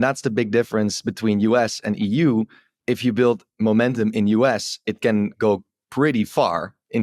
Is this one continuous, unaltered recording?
yes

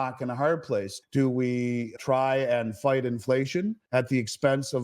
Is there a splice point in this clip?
yes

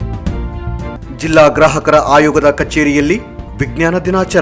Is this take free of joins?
yes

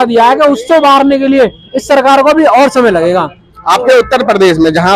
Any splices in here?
no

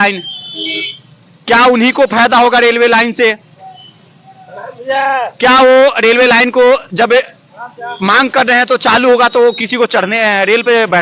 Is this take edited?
no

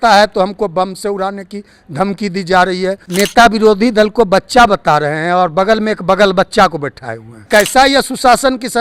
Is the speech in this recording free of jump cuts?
no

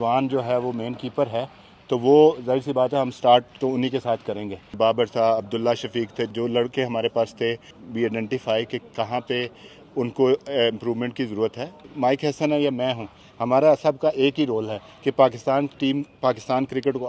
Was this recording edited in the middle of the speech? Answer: yes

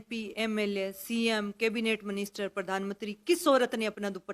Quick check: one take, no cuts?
yes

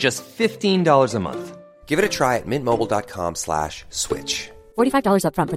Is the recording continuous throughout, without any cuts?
yes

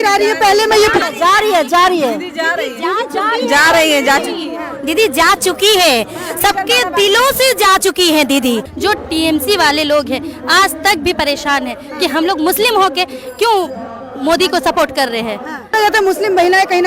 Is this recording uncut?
no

